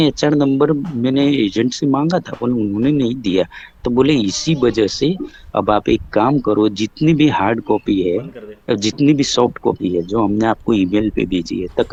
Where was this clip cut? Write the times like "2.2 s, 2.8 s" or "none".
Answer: none